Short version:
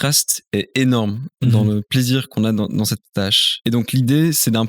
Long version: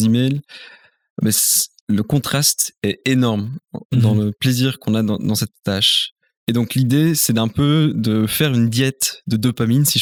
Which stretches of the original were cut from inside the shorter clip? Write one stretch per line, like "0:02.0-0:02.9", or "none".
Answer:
0:03.6-0:03.8
0:05.9-0:06.3

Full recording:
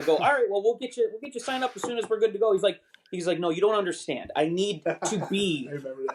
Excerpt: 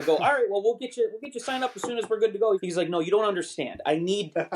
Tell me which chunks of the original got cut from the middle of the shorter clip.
0:02.6-0:03.1

